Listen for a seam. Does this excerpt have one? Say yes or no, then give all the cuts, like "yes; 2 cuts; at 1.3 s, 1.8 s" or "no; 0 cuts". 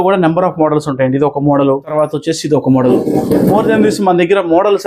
no; 0 cuts